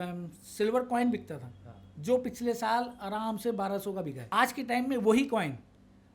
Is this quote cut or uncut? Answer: cut